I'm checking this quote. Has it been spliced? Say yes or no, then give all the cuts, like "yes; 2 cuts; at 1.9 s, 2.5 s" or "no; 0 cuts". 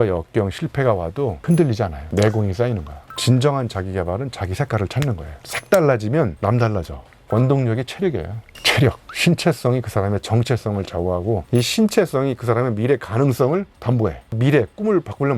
yes; 3 cuts; at 3.0 s, 7.2 s, 14.2 s